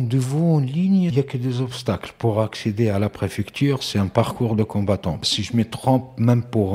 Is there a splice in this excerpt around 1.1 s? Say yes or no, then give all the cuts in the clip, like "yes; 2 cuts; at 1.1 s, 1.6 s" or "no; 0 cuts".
yes; 2 cuts; at 1.1 s, 5.2 s